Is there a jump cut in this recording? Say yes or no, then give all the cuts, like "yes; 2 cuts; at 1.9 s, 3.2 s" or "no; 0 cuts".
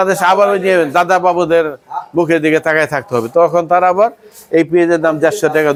no; 0 cuts